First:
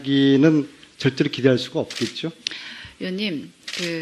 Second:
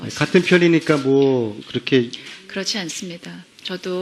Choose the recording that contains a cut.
second; 1 cut; at 1.9 s

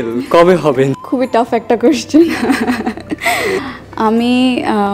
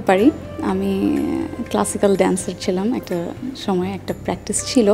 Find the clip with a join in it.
first; 2 cuts; at 1.0 s, 3.6 s

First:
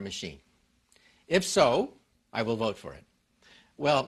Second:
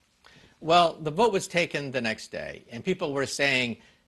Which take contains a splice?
first; 1 cut; at 2.3 s

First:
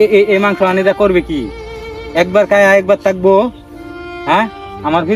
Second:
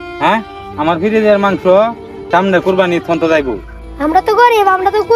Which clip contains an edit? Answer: second; 1 cut; at 2.1 s

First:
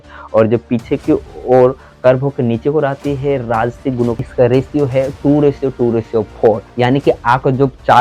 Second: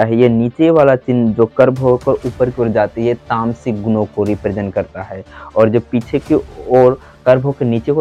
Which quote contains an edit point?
first; 1 cut; at 4.2 s

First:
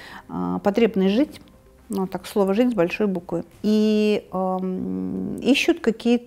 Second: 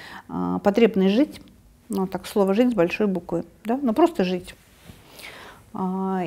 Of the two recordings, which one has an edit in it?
first; 1 cut; at 3.5 s

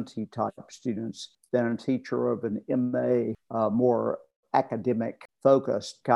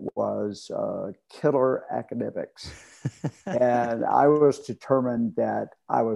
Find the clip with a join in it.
first; 3 cuts; at 1.3 s, 3.4 s, 5.2 s

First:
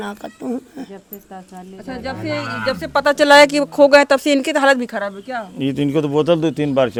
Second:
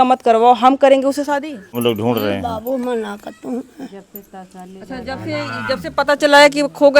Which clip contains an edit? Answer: second; 1 cut; at 1.6 s

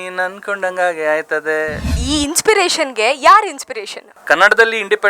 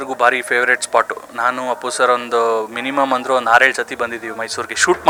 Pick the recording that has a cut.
first; 2 cuts; at 2.0 s, 4.1 s

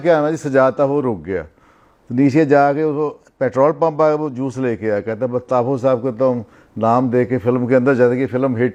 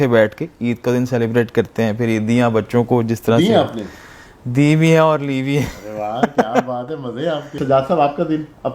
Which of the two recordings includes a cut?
second; 1 cut; at 7.6 s

